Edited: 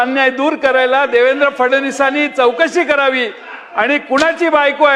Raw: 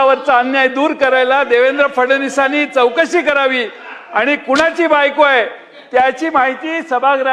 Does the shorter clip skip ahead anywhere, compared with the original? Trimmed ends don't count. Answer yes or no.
no